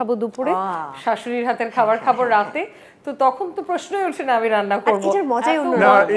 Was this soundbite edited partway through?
no; 0 cuts

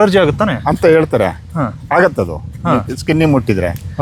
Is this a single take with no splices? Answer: yes; 0 cuts

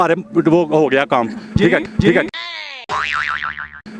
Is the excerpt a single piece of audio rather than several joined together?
yes; 0 cuts

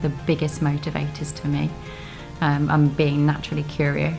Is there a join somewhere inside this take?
no; 0 cuts

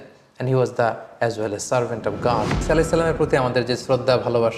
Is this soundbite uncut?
no; 1 cut; at 2.6 s

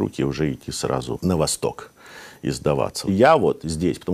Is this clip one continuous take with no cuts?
no; 2 cuts; at 1.2 s, 3.0 s

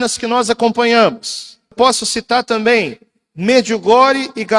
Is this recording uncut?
no; 1 cut; at 1.7 s

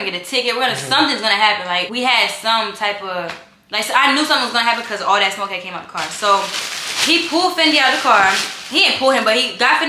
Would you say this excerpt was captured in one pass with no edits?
yes; 0 cuts

